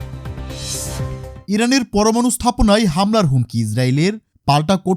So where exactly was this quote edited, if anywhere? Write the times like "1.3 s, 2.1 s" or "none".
1.4 s